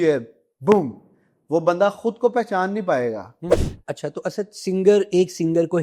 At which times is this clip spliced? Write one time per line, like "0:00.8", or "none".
0:03.5